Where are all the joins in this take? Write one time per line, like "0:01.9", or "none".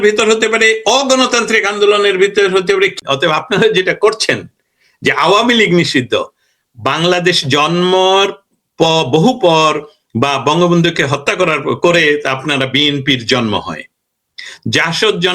0:03.0